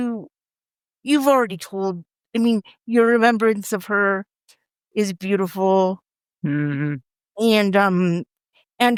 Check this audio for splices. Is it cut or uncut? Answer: uncut